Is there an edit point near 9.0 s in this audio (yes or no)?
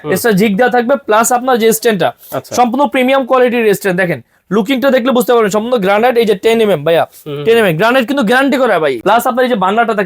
yes